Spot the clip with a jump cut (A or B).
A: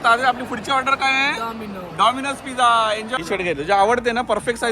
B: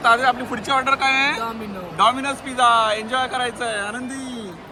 A